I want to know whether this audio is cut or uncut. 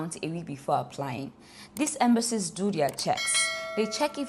uncut